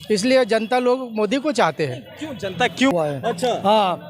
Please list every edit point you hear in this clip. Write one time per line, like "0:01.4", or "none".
0:02.9

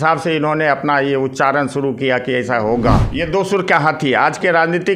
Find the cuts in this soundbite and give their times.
0:03.1

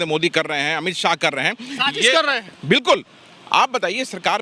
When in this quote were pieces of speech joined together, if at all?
none

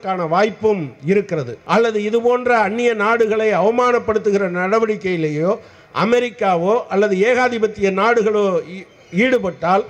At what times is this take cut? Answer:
0:01.5

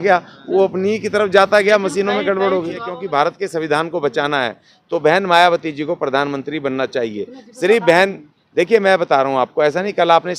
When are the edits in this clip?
0:02.9

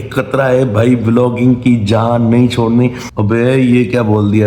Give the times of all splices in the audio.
0:03.1

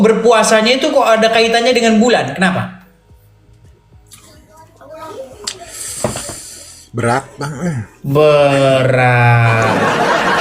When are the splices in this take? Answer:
none

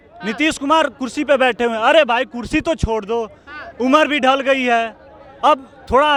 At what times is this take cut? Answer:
none

